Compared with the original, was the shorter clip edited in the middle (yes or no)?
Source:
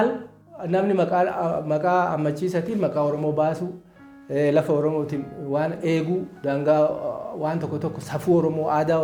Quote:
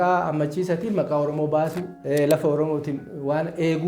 yes